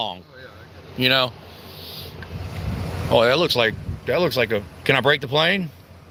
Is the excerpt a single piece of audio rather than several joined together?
yes; 0 cuts

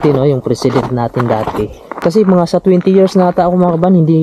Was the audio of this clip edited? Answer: yes; 1 cut; at 1.8 s

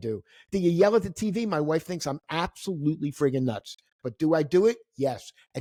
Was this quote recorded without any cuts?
yes; 0 cuts

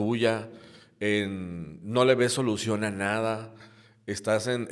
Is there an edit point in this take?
no; 0 cuts

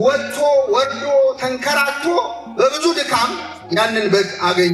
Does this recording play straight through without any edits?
yes; 0 cuts

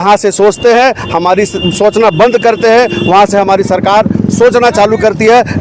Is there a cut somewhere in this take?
no; 0 cuts

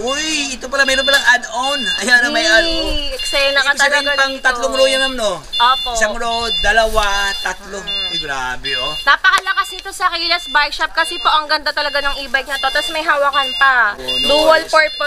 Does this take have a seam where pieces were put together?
no; 0 cuts

